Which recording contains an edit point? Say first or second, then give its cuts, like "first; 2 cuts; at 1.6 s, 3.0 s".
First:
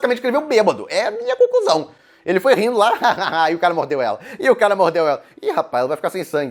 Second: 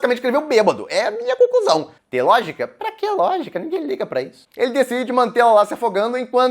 second; 2 cuts; at 2.0 s, 4.4 s